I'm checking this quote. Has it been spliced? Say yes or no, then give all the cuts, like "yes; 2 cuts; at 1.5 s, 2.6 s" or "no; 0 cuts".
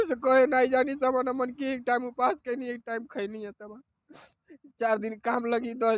no; 0 cuts